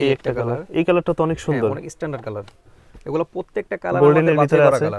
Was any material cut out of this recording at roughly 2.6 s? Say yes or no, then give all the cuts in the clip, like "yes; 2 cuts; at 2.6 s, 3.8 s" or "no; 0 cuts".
no; 0 cuts